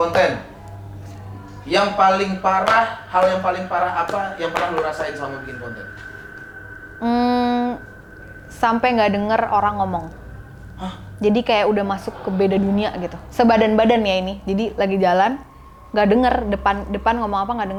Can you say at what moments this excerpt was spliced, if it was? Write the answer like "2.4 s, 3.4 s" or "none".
none